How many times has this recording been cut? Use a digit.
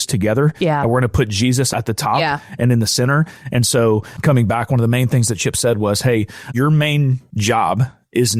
4